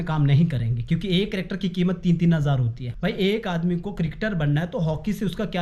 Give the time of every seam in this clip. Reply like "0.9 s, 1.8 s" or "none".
2.8 s